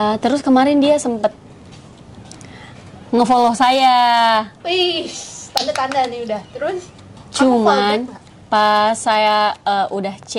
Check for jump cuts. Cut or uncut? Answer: uncut